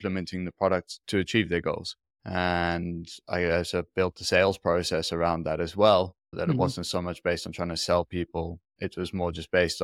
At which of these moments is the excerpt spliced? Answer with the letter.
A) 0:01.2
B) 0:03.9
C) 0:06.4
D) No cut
D